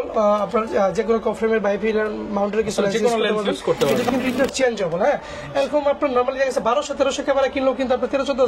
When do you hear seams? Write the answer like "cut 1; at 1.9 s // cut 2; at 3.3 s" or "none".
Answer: cut 1; at 4.1 s